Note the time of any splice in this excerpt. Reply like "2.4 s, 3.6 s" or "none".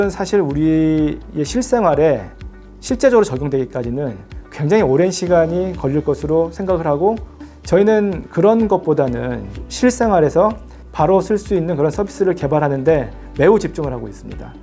9.6 s, 10.9 s